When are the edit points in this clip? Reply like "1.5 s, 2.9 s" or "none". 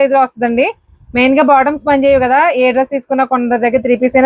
none

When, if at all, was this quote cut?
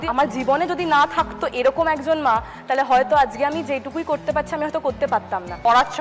none

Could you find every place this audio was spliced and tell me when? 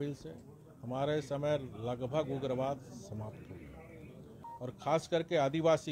4.4 s

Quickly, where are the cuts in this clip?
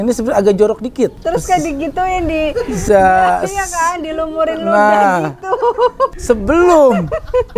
1.2 s, 6.2 s

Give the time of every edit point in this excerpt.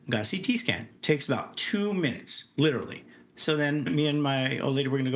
3.6 s

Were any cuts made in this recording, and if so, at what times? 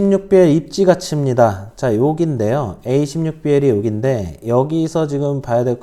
none

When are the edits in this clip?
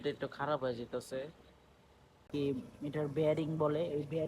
2.3 s

